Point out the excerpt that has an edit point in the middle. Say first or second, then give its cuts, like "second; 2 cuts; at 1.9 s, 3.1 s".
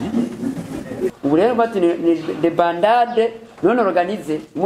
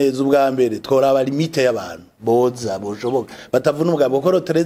first; 1 cut; at 1.2 s